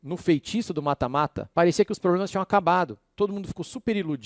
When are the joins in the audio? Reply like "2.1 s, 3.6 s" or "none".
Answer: 1.4 s